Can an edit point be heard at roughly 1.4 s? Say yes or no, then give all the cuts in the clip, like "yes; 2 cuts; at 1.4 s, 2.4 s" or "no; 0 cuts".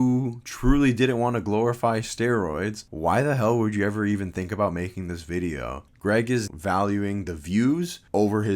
no; 2 cuts; at 2.8 s, 6.5 s